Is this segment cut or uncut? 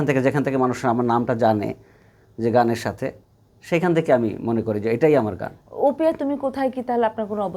uncut